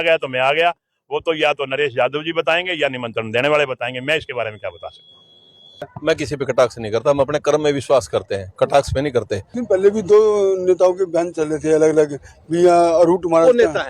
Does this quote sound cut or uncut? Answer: cut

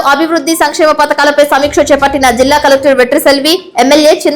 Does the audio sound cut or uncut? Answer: uncut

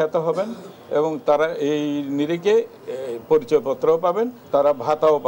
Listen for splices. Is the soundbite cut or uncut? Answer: cut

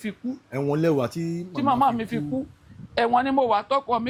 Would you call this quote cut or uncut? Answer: uncut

